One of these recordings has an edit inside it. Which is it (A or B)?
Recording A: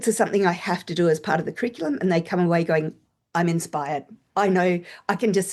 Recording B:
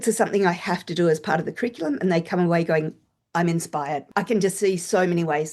B